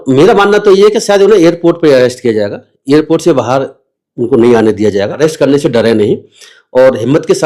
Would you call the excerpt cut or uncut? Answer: cut